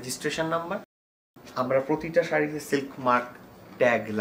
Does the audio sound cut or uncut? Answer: uncut